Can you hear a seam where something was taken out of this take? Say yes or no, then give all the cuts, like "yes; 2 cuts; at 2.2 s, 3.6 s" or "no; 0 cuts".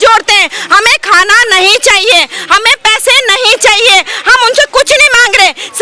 no; 0 cuts